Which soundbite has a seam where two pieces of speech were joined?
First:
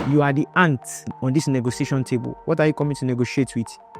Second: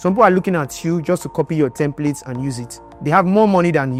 first; 1 cut; at 1.1 s

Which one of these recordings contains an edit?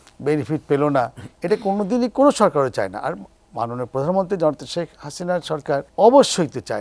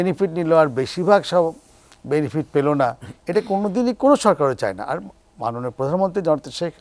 first; 1 cut; at 5.9 s

